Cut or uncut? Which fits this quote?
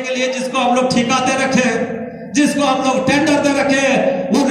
uncut